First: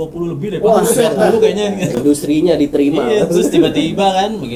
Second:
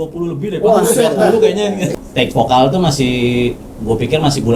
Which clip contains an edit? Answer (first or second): second